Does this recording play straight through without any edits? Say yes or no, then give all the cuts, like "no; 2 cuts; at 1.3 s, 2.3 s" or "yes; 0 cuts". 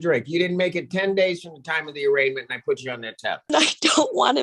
no; 1 cut; at 3.5 s